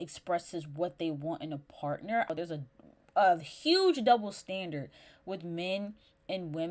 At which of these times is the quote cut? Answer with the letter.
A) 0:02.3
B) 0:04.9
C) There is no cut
A